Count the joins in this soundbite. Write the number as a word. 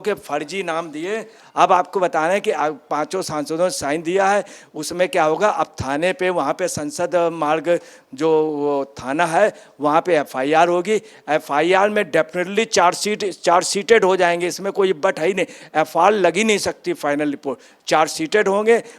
one